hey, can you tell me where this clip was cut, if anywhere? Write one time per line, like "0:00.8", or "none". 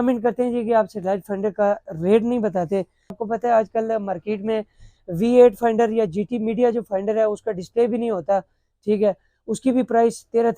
0:03.2